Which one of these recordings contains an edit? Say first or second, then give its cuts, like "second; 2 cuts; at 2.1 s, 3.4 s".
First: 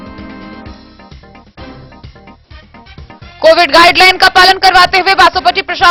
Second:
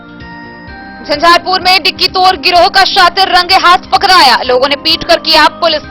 second; 1 cut; at 1.0 s